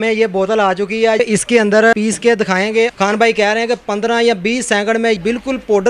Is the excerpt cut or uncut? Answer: cut